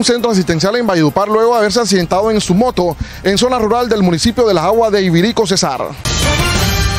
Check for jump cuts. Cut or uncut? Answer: cut